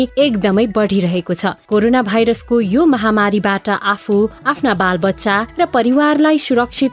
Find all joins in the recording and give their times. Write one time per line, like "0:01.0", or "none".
none